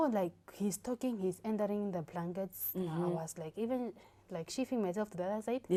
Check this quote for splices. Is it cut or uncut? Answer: uncut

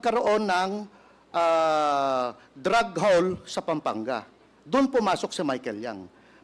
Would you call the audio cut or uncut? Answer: uncut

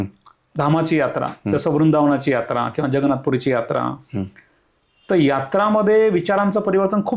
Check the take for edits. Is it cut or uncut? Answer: uncut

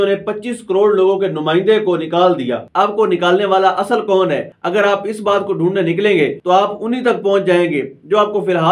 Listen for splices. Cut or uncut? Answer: cut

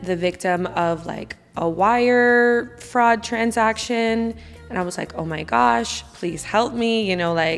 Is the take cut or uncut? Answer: uncut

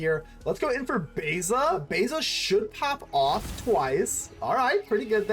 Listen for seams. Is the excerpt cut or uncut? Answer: cut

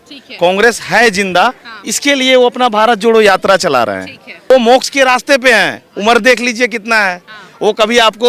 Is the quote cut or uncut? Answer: cut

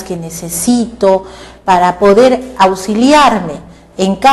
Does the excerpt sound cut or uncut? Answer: cut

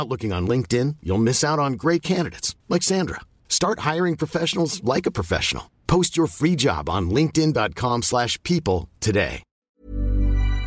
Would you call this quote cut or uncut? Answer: cut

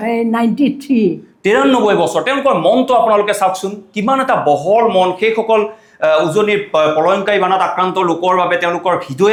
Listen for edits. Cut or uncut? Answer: uncut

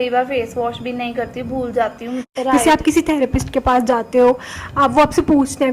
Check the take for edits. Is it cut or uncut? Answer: cut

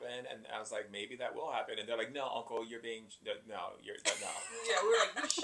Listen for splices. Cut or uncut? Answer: uncut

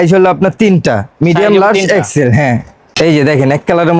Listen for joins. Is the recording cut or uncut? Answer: cut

